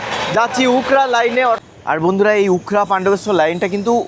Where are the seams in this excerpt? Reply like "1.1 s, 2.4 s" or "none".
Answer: 1.6 s